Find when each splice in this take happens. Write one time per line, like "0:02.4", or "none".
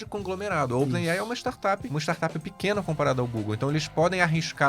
0:01.9